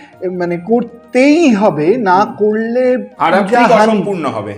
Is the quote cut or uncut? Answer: uncut